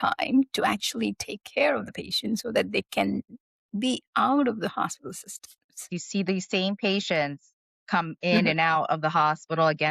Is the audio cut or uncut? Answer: cut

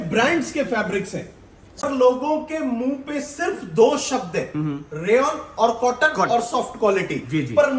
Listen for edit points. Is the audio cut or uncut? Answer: cut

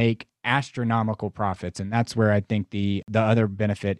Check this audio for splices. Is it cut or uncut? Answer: cut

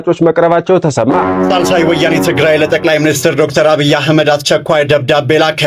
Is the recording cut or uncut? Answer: cut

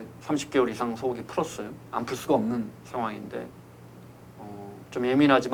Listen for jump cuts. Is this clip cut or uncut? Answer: uncut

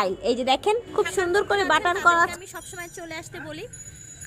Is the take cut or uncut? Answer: cut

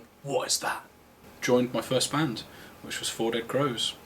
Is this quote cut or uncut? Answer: cut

